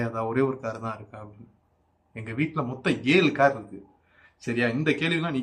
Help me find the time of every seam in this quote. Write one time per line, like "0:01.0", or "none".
none